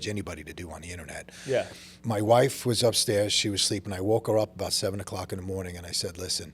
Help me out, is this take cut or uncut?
cut